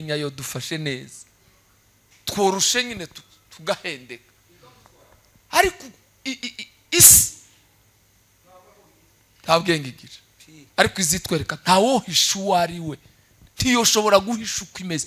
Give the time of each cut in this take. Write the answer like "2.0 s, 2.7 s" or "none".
none